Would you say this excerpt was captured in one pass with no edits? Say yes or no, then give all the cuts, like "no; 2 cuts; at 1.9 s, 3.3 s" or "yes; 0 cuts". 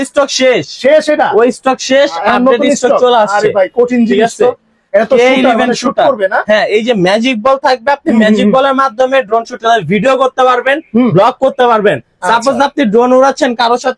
yes; 0 cuts